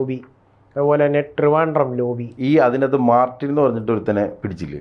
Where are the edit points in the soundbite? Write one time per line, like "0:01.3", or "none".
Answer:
0:02.3